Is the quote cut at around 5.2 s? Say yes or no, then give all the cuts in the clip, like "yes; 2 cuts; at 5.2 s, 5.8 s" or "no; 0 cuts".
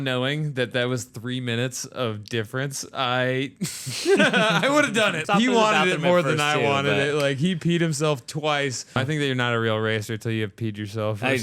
yes; 2 cuts; at 5.2 s, 9.0 s